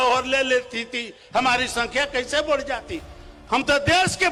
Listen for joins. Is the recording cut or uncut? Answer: uncut